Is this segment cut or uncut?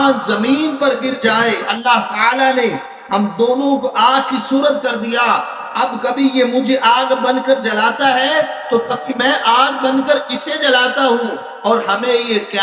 cut